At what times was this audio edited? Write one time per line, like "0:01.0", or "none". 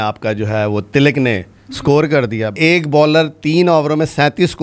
0:02.6